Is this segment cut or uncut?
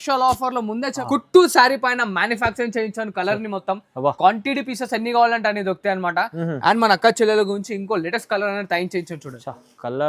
cut